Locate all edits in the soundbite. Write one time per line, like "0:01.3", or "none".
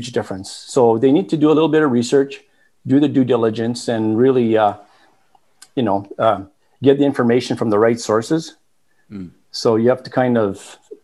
none